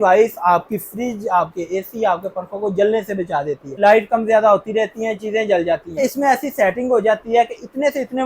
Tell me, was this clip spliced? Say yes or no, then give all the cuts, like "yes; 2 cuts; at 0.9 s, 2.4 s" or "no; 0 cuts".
yes; 2 cuts; at 3.7 s, 6.0 s